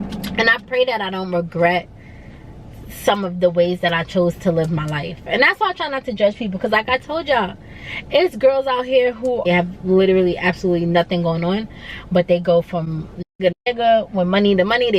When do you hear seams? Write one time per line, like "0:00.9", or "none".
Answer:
0:09.4